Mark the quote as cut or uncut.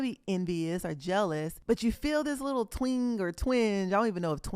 cut